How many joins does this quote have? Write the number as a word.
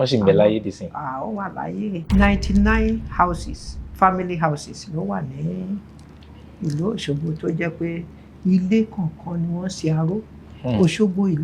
one